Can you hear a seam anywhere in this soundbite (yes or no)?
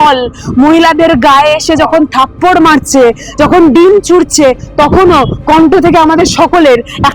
no